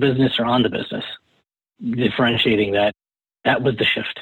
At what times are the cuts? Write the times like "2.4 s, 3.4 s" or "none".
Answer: 3.3 s